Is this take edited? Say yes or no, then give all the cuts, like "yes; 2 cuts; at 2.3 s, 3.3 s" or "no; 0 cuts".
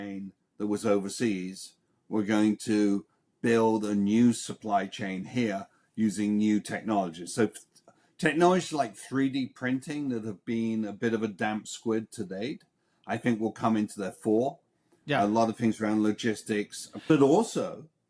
yes; 1 cut; at 17.1 s